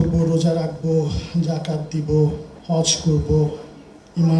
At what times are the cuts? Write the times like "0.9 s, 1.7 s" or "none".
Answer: 2.5 s